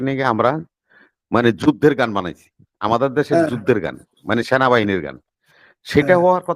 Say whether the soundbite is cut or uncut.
uncut